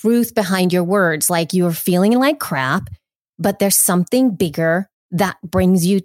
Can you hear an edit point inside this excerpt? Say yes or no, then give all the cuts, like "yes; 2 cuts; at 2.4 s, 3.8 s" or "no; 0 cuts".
no; 0 cuts